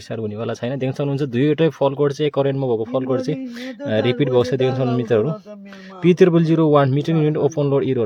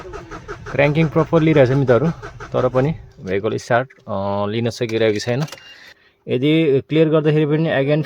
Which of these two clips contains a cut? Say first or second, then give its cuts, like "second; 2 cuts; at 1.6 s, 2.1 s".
second; 1 cut; at 6.0 s